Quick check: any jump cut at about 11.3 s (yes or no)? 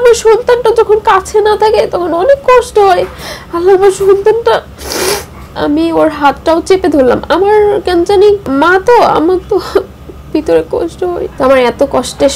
yes